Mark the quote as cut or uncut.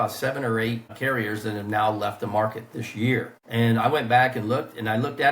cut